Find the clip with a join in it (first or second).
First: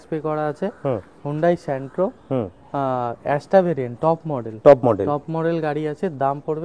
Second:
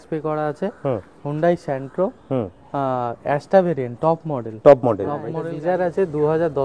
second